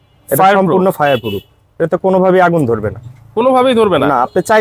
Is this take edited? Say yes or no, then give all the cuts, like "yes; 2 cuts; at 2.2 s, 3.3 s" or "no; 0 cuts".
no; 0 cuts